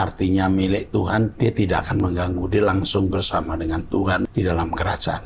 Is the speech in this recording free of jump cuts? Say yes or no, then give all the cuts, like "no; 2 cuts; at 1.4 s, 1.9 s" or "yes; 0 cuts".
no; 2 cuts; at 1.3 s, 4.3 s